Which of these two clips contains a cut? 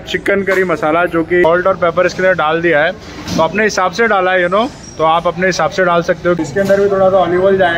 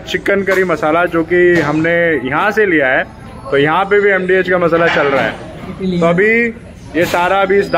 first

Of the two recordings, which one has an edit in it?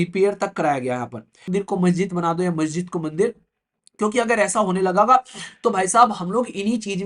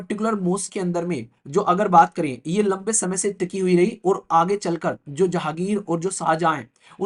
first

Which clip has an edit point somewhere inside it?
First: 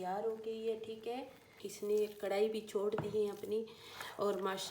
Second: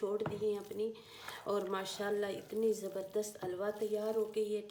first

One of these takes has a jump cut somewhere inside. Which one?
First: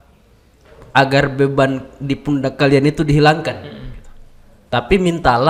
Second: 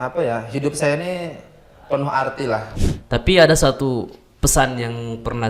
second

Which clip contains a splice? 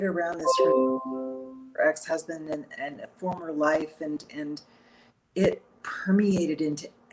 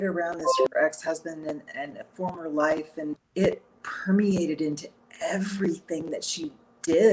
second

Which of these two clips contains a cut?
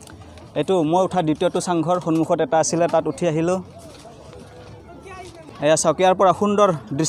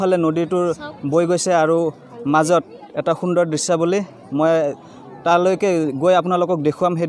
first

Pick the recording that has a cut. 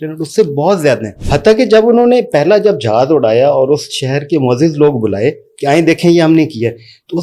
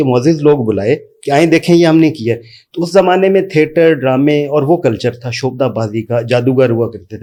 first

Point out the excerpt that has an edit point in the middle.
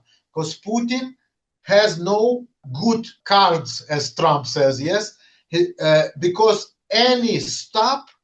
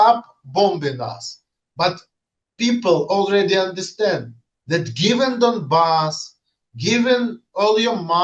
first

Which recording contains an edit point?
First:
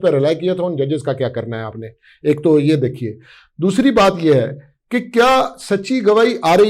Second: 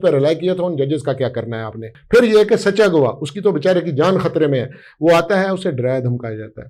second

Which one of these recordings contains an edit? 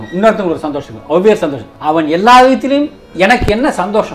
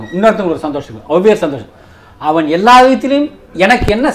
first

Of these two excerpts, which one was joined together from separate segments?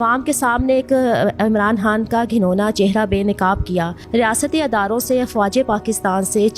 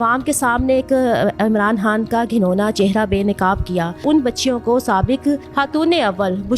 second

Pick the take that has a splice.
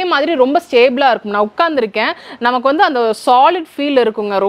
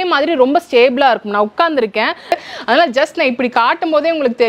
second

